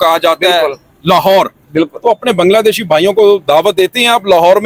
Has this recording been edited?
no; 0 cuts

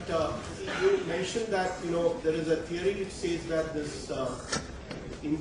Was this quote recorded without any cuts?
no; 1 cut; at 1.3 s

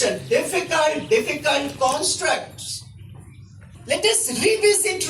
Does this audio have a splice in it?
yes; 1 cut; at 3.7 s

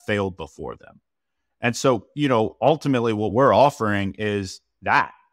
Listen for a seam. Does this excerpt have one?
no; 0 cuts

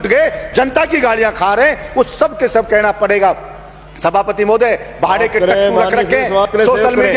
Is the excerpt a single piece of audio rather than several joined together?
yes; 0 cuts

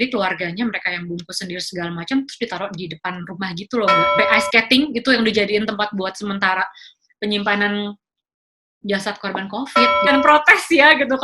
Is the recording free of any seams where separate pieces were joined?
no; 2 cuts; at 4.2 s, 10.1 s

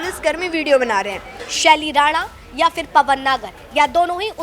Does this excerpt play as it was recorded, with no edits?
no; 1 cut; at 1.5 s

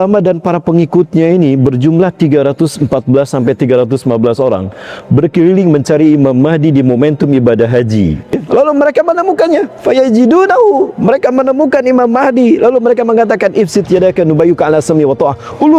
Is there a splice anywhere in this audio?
yes; 1 cut; at 8.3 s

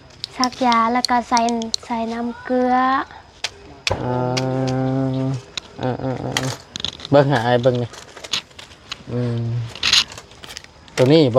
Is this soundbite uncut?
yes; 0 cuts

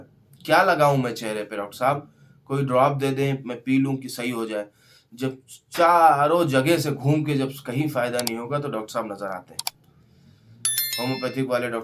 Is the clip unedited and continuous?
yes; 0 cuts

